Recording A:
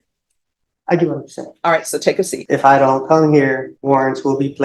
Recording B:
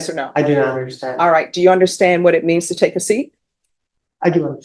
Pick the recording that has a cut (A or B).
A